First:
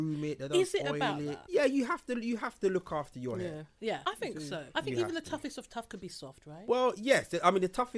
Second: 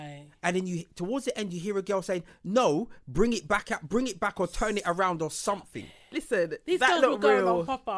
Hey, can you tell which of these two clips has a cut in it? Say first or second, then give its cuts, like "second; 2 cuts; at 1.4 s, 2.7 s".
first; 2 cuts; at 1.3 s, 4.7 s